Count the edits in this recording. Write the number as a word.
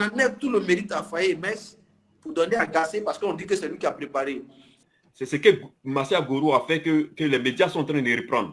one